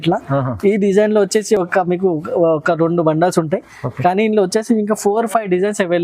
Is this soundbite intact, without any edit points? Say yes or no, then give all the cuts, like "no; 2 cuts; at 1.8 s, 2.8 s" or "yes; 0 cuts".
yes; 0 cuts